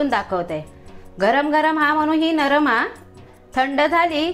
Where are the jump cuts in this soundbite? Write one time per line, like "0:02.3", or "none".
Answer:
none